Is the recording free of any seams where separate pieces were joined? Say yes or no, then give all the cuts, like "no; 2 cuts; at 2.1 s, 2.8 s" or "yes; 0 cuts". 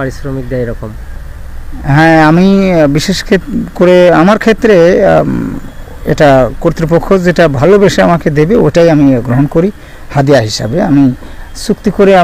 yes; 0 cuts